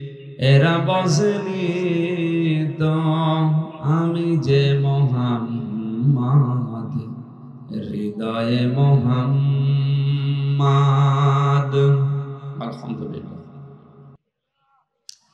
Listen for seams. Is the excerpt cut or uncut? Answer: uncut